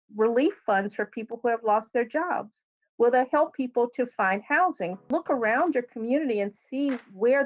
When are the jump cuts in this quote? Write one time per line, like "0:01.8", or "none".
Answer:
0:05.1

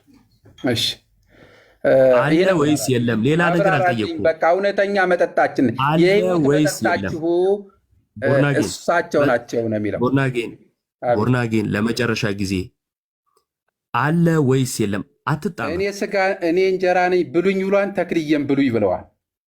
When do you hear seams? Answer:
0:15.6

